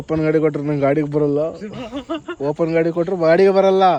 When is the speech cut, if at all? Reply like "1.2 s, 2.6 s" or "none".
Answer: none